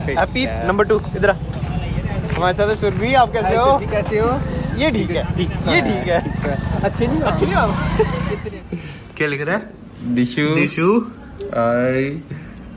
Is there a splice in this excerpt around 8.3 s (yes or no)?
yes